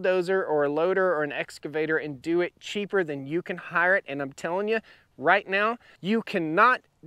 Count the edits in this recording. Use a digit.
1